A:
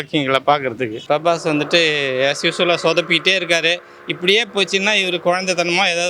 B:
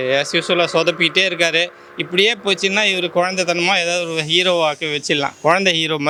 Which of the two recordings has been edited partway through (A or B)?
A